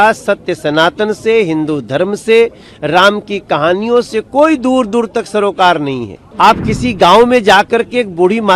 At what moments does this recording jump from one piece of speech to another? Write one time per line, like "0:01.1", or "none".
0:06.2